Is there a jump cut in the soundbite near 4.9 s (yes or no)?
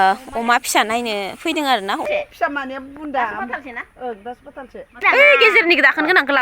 yes